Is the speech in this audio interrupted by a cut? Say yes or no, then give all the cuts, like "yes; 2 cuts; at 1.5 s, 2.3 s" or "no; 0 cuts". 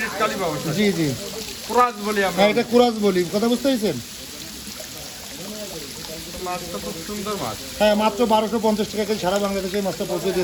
no; 0 cuts